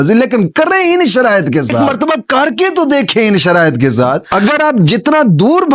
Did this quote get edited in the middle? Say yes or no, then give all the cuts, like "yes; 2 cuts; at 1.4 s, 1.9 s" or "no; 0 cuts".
yes; 2 cuts; at 1.8 s, 4.2 s